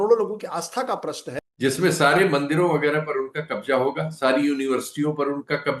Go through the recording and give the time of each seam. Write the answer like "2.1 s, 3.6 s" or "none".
1.2 s